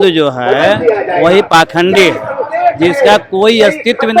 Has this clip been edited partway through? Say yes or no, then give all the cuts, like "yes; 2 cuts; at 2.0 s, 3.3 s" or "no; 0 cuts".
no; 0 cuts